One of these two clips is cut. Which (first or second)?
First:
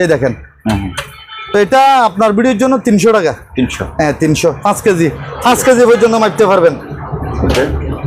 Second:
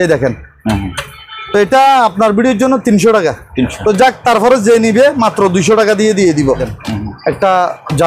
second